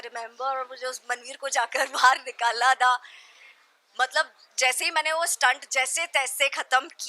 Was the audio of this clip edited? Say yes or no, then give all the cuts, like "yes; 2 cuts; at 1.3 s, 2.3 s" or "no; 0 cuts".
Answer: no; 0 cuts